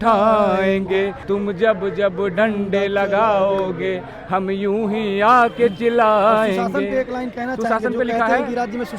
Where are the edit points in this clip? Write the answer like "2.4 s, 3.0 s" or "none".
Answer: 1.2 s

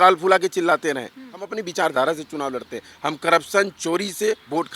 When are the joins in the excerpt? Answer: 1.6 s

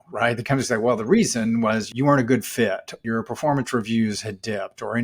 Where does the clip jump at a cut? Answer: 1.9 s, 3.0 s

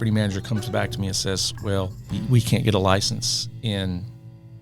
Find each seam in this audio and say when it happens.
2.0 s

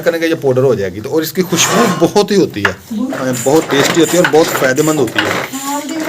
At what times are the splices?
3.2 s

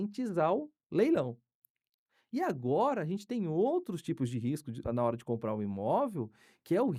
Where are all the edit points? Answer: none

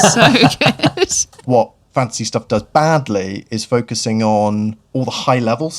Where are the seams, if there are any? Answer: 1.4 s

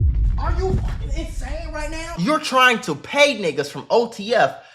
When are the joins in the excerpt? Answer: 2.1 s

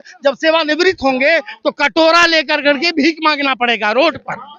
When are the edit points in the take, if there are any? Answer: none

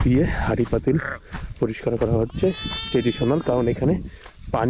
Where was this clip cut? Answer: none

